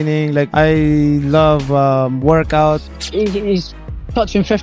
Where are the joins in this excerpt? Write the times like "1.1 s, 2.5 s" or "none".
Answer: 2.9 s